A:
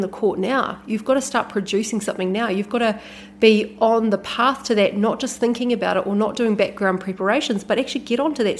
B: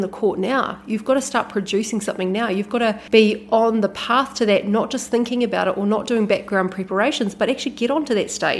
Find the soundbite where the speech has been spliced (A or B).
B